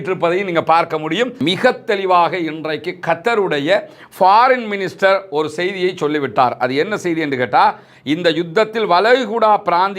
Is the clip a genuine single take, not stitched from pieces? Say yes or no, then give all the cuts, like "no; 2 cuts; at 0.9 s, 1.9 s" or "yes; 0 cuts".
no; 1 cut; at 1.4 s